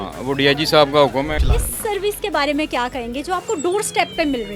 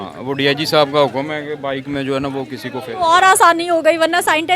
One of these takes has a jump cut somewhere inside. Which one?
first; 1 cut; at 1.4 s

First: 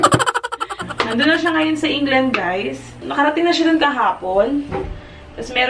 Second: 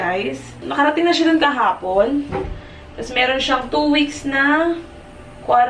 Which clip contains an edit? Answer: first; 1 cut; at 1.0 s

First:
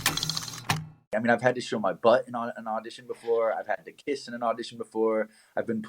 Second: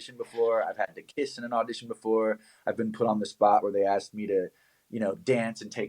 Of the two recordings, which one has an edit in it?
first; 1 cut; at 1.1 s

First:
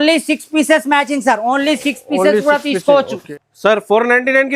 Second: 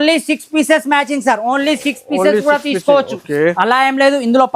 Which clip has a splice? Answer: first; 1 cut; at 3.2 s

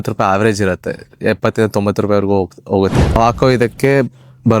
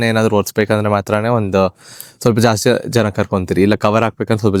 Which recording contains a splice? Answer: first; 1 cut; at 3.1 s

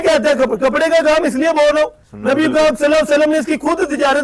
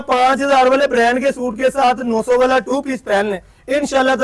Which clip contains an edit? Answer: first; 1 cut; at 2.1 s

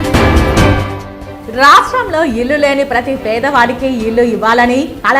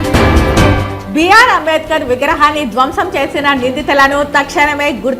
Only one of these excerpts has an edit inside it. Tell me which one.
second; 1 cut; at 1.0 s

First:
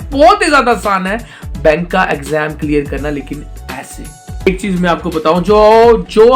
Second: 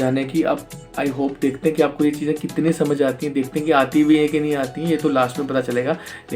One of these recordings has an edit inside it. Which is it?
first; 1 cut; at 4.4 s

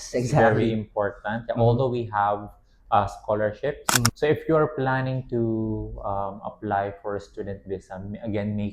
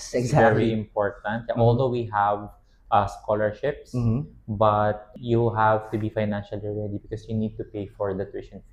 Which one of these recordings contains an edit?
first; 1 cut; at 4.1 s

